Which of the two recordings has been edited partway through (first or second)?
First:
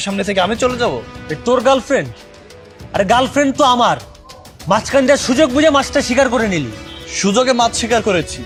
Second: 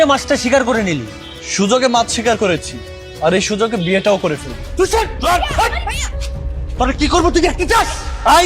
second